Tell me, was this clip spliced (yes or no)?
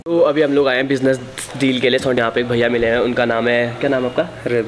yes